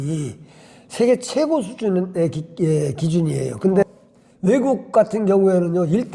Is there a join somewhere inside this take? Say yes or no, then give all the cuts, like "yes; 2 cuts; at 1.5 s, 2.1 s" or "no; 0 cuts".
yes; 1 cut; at 3.8 s